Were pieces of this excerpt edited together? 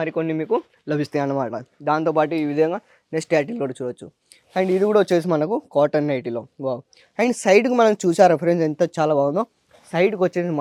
no; 0 cuts

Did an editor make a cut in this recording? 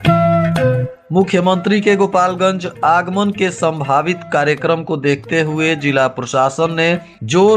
yes; 1 cut; at 0.9 s

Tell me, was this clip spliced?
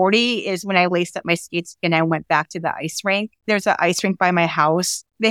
no; 0 cuts

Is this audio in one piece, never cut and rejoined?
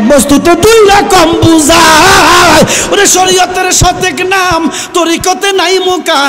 yes; 0 cuts

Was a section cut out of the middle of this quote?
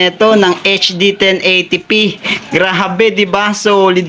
no; 0 cuts

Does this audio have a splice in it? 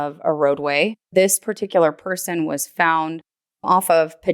yes; 1 cut; at 1.0 s

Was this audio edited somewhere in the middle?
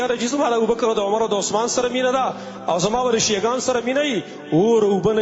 no; 0 cuts

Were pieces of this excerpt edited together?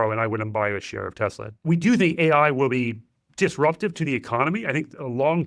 yes; 1 cut; at 1.6 s

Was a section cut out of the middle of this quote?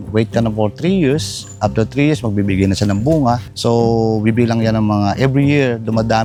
no; 0 cuts

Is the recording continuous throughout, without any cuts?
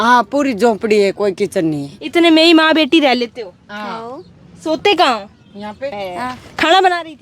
no; 1 cut; at 6.0 s

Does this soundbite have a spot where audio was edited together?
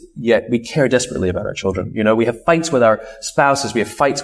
no; 0 cuts

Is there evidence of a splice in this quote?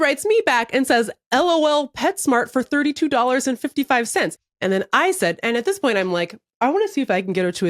yes; 1 cut; at 4.4 s

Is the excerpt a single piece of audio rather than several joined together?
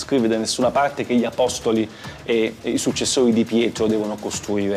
yes; 0 cuts

